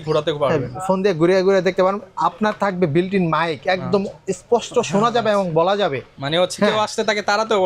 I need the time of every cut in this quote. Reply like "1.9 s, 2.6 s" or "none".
none